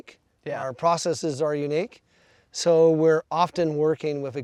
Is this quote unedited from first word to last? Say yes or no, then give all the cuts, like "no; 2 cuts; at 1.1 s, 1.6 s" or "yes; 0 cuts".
yes; 0 cuts